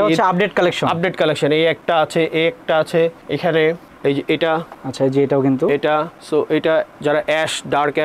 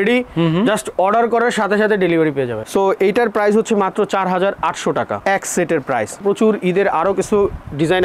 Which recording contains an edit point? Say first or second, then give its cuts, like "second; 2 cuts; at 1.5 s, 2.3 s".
second; 2 cuts; at 2.6 s, 6.2 s